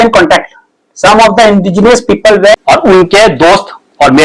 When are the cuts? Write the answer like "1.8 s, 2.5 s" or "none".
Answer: 2.6 s

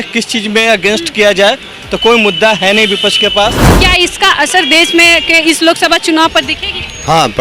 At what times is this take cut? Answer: 3.8 s

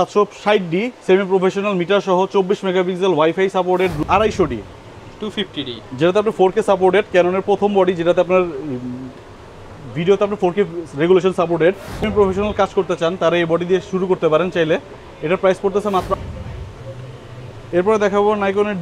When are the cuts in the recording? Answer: 3.9 s, 12.0 s, 16.1 s

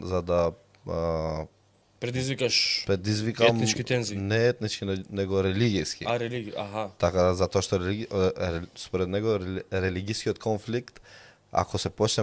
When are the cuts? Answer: none

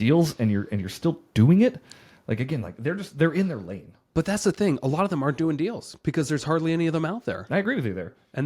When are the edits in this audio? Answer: none

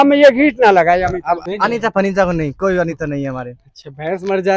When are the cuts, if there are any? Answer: 1.4 s

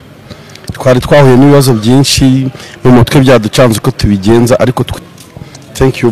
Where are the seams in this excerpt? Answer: 4.9 s

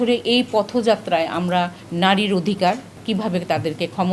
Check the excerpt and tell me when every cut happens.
1.8 s, 3.0 s

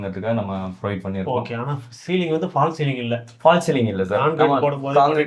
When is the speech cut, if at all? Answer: none

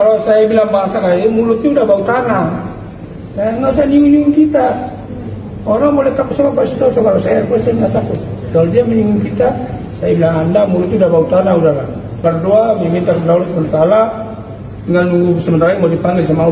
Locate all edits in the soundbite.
none

